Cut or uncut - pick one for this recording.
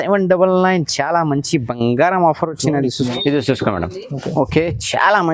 cut